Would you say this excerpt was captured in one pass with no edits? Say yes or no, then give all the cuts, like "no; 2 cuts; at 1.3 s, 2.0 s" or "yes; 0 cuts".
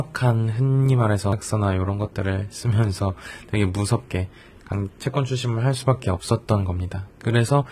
no; 1 cut; at 1.3 s